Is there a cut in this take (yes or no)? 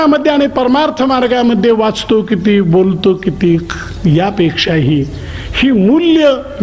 no